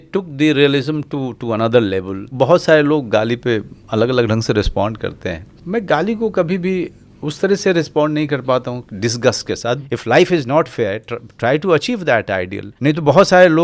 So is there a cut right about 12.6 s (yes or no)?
yes